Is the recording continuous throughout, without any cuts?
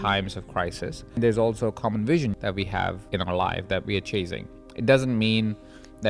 no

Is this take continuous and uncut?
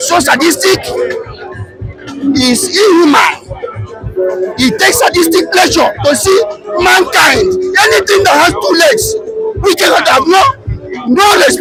yes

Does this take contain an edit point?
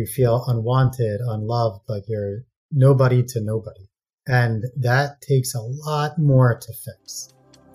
no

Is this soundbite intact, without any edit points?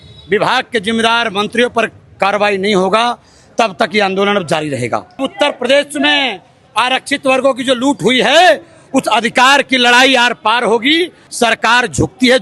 no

